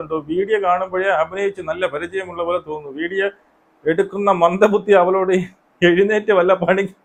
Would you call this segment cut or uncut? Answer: uncut